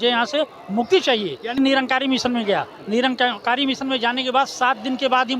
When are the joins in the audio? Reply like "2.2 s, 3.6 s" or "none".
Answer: 1.6 s

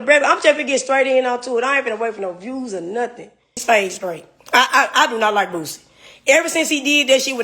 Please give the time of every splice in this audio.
3.5 s

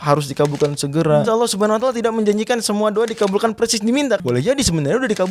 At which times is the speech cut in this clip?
1.3 s, 4.2 s

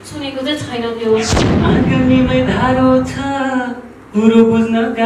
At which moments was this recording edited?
1.5 s

